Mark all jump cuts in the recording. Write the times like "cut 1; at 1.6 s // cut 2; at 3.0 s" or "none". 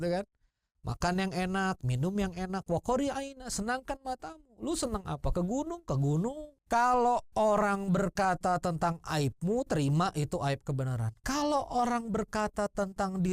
cut 1; at 6.5 s